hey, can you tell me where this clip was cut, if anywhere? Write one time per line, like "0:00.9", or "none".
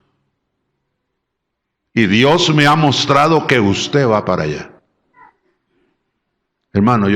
0:05.2

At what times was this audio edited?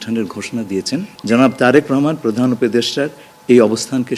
0:01.1

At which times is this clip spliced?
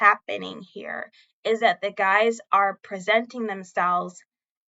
none

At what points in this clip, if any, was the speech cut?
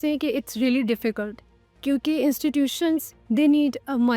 none

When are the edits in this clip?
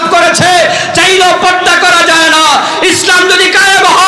none

